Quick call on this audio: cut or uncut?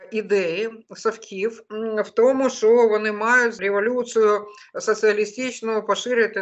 cut